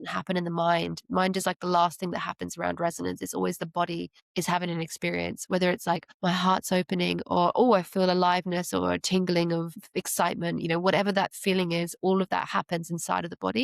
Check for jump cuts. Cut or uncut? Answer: cut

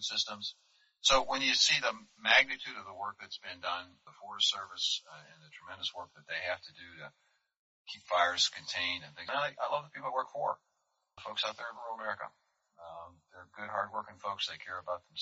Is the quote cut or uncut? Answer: cut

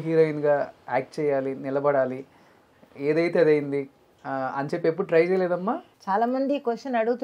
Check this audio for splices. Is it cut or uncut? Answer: uncut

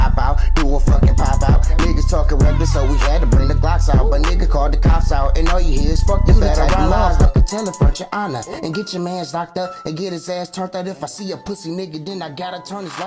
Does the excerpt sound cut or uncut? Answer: cut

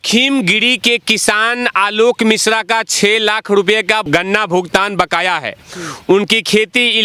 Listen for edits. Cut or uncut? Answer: uncut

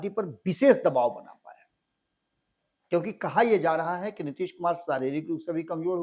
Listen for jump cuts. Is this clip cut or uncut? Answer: uncut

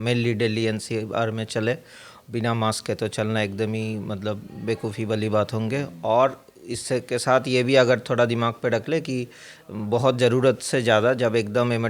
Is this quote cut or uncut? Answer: uncut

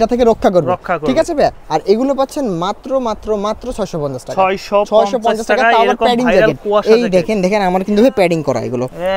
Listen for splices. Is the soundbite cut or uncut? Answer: uncut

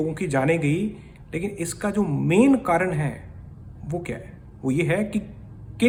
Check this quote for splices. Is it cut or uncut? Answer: uncut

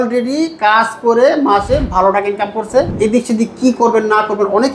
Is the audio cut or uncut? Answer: cut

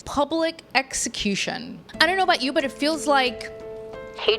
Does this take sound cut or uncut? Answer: cut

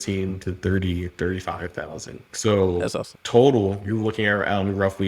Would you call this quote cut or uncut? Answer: cut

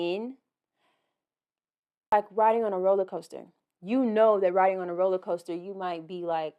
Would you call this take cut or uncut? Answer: cut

